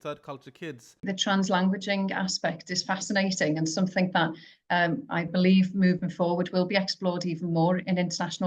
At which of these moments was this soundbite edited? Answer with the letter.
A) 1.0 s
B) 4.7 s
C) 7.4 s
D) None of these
A